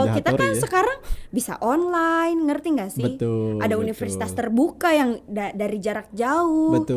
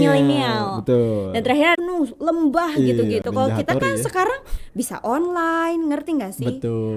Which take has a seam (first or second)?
second